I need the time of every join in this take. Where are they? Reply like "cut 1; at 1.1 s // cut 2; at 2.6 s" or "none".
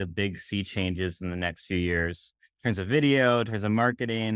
cut 1; at 2.3 s

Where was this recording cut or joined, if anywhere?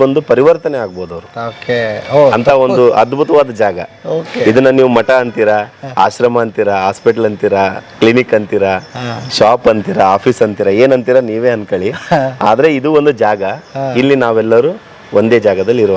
none

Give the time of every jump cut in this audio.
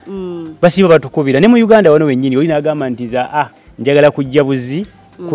none

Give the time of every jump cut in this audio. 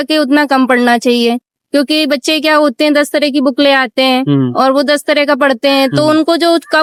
none

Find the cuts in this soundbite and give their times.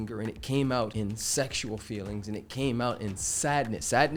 cut 1; at 0.9 s

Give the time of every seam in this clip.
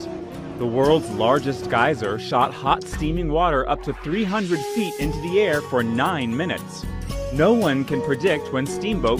cut 1; at 6.4 s

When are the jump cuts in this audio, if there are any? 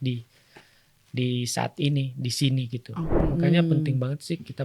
cut 1; at 3.2 s

